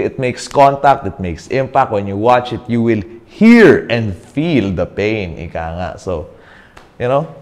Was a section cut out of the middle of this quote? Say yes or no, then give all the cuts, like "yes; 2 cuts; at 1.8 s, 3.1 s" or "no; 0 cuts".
no; 0 cuts